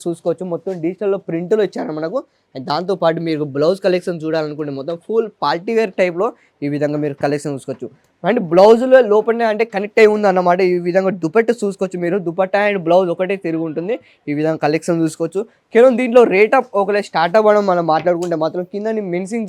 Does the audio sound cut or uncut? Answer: uncut